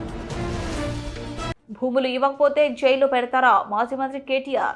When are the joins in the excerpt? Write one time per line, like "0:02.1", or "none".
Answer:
0:01.6